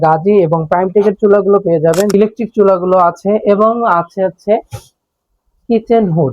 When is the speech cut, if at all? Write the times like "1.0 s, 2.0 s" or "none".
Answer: 2.1 s